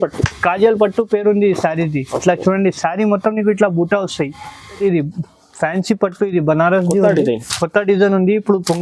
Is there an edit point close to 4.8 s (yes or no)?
yes